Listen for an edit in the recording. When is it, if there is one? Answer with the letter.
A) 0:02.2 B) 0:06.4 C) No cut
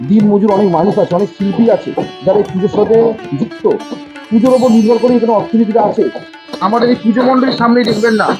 C